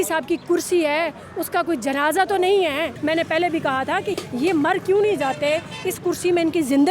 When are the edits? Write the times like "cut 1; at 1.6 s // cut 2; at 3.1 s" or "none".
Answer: cut 1; at 2.9 s // cut 2; at 4.2 s